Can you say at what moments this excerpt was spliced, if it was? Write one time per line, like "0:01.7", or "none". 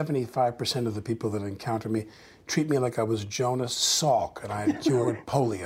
none